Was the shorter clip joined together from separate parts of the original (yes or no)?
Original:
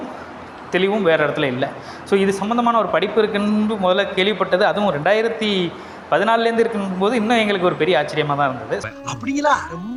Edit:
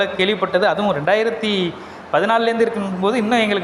no